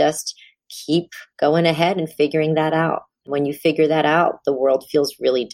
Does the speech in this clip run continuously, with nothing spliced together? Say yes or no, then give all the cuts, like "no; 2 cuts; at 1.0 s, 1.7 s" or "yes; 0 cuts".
yes; 0 cuts